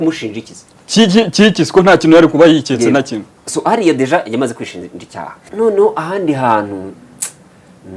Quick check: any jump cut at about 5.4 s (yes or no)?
yes